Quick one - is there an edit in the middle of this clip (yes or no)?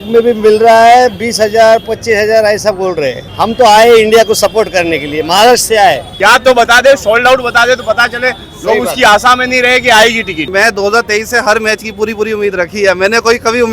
yes